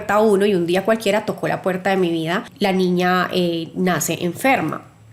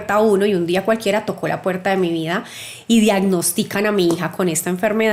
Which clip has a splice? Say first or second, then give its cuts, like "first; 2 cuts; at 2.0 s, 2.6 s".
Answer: first; 1 cut; at 2.5 s